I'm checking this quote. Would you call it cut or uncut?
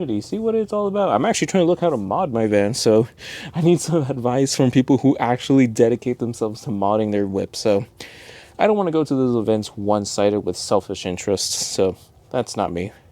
uncut